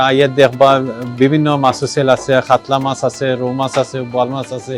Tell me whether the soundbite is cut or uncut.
uncut